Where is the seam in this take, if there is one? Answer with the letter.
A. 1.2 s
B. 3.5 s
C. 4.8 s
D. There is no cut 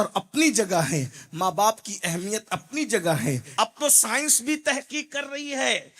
B